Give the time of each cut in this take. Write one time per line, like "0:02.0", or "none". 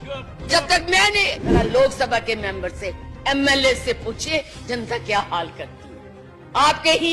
0:01.4